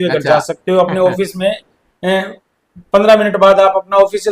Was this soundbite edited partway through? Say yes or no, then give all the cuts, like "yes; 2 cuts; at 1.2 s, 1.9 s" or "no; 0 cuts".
no; 0 cuts